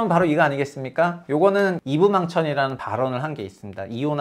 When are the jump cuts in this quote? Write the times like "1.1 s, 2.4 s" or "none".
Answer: 1.8 s